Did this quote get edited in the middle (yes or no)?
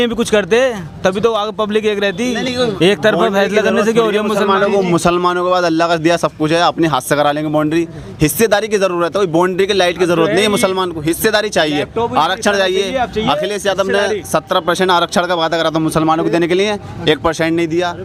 no